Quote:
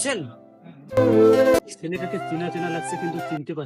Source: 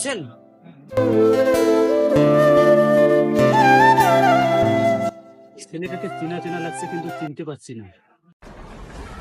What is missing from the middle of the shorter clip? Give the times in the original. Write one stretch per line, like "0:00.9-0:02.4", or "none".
0:01.6-0:05.5